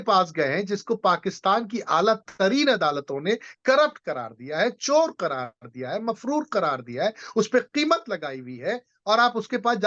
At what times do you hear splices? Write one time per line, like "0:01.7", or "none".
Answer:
none